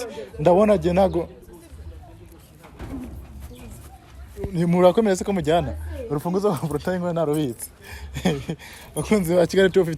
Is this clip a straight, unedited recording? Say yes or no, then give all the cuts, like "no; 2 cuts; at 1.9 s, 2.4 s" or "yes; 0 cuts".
yes; 0 cuts